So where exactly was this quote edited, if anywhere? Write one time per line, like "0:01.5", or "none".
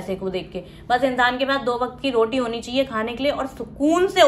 none